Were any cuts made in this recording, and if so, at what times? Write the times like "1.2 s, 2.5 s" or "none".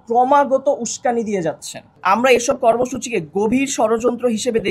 2.0 s